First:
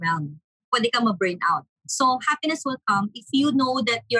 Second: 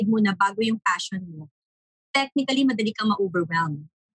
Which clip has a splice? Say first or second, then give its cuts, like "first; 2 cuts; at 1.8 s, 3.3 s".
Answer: first; 2 cuts; at 1.8 s, 3.2 s